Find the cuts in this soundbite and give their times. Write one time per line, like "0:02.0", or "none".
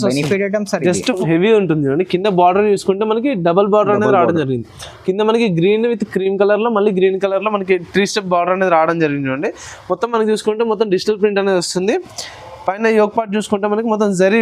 0:01.2